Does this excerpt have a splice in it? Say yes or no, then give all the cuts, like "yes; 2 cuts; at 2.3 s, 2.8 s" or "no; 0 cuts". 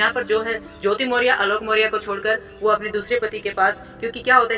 no; 0 cuts